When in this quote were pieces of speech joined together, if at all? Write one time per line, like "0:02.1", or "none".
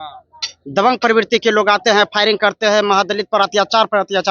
none